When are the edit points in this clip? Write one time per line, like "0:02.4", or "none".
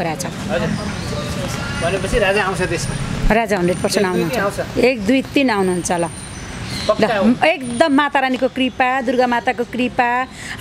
none